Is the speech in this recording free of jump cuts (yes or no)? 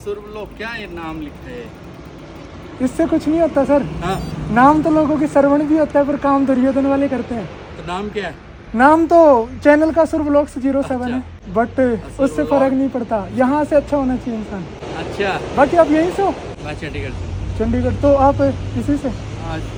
yes